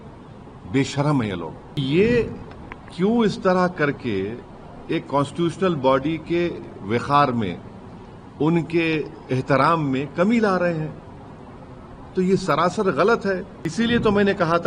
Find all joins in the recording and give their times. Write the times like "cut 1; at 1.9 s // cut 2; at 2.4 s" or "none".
cut 1; at 1.8 s // cut 2; at 13.6 s